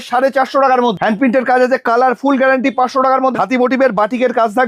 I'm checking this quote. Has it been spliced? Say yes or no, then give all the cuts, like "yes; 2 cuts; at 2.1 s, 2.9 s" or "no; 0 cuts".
yes; 2 cuts; at 1.0 s, 3.3 s